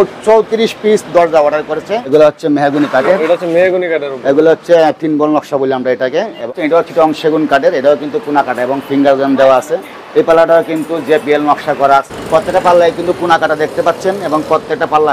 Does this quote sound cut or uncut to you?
cut